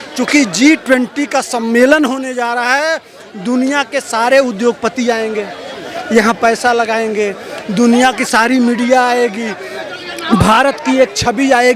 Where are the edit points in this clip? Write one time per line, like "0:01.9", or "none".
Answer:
none